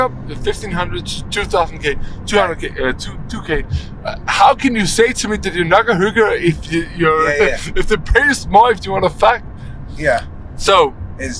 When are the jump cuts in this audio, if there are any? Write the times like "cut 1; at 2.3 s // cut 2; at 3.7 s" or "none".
none

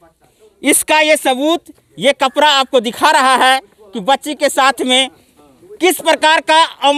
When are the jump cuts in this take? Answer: none

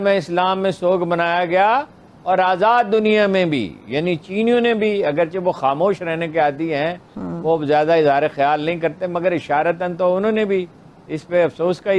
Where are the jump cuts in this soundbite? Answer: none

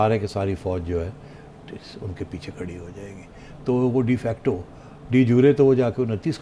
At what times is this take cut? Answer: none

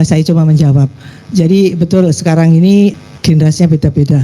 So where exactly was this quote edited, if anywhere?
cut 1; at 3.0 s

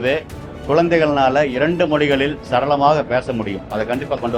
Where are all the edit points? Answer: none

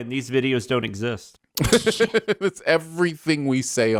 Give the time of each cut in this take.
none

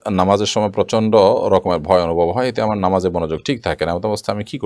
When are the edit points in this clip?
none

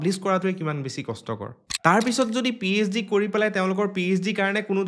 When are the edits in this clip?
none

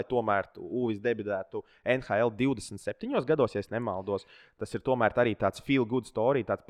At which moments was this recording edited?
none

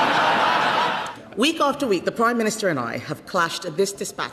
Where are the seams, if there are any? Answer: cut 1; at 1.0 s

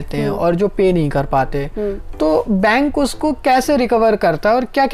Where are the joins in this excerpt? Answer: none

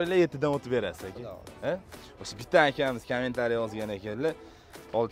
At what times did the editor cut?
cut 1; at 1.9 s

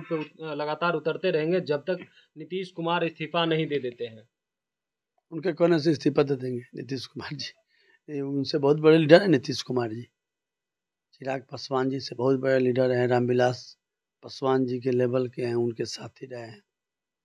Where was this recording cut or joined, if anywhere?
none

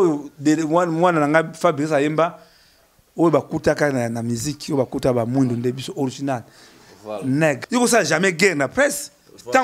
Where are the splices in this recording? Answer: cut 1; at 7.6 s

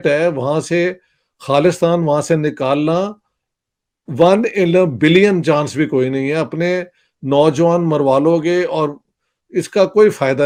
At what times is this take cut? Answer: none

